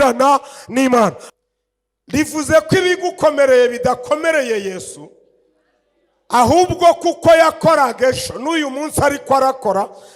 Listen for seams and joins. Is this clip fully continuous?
no; 1 cut; at 1.2 s

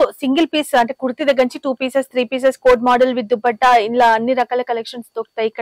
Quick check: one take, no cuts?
yes; 0 cuts

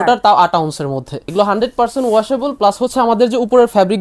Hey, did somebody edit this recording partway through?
yes; 1 cut; at 1.2 s

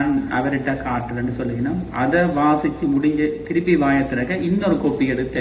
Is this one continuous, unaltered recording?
yes; 0 cuts

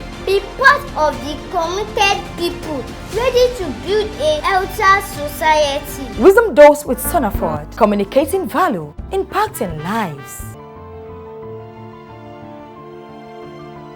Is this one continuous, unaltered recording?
yes; 0 cuts

